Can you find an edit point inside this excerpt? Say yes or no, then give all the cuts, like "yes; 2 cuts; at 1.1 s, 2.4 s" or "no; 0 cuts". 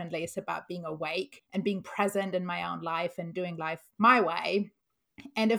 yes; 1 cut; at 1.4 s